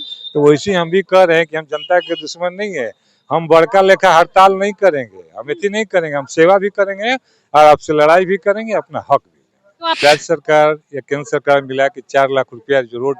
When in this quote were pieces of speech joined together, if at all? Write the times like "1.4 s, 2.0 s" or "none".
10.0 s

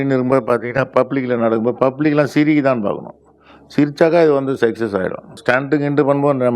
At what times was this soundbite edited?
5.4 s

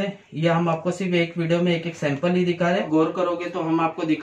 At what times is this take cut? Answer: 2.9 s

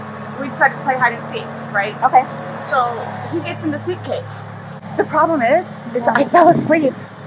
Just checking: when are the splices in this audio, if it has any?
4.8 s

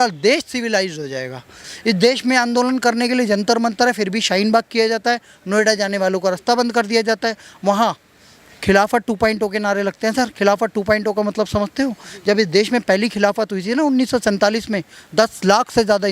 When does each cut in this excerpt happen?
1.5 s

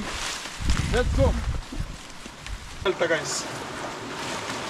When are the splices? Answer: 2.9 s

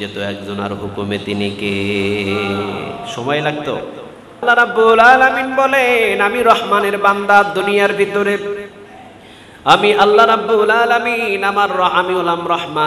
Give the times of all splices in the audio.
4.4 s

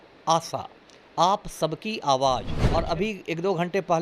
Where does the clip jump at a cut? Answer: 2.5 s

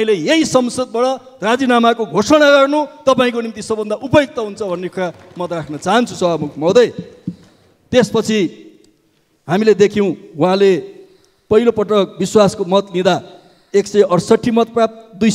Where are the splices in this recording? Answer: none

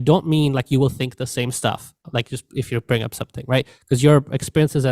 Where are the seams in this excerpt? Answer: 2.1 s

